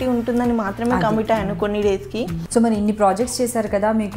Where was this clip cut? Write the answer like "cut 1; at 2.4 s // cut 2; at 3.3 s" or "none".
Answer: cut 1; at 2.4 s